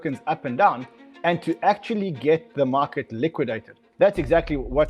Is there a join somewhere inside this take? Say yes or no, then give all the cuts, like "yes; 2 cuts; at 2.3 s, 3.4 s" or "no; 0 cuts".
yes; 1 cut; at 3.8 s